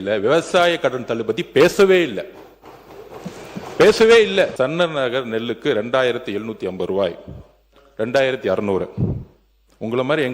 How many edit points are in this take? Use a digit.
1